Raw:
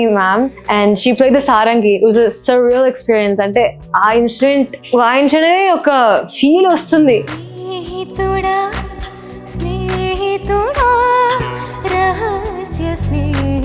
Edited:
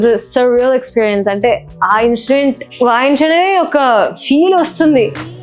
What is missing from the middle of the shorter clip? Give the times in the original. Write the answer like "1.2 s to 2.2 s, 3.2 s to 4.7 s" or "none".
none